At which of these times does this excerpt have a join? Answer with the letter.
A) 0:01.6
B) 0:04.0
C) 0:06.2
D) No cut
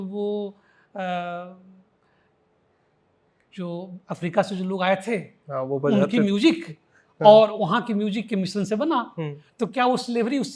D